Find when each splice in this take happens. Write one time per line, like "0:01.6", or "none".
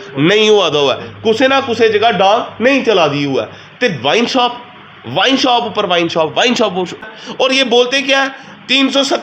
0:07.0